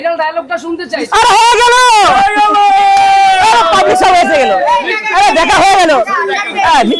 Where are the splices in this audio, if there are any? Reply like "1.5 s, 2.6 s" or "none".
none

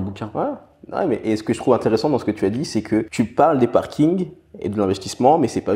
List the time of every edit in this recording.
3.1 s

